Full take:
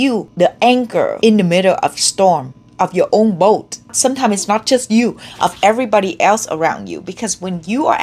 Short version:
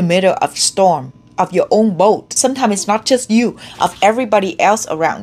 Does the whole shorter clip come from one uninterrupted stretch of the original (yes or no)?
no